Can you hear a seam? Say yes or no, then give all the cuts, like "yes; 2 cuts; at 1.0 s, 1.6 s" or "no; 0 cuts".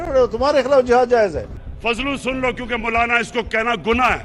yes; 1 cut; at 1.6 s